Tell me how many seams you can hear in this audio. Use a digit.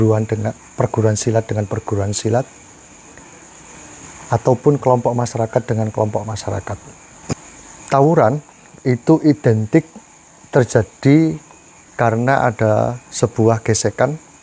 1